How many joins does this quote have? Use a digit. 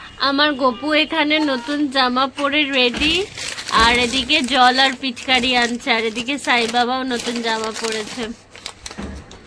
0